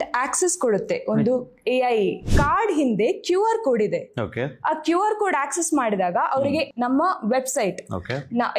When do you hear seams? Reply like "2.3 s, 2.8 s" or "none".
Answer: 2.3 s